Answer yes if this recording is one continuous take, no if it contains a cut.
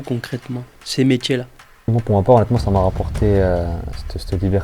no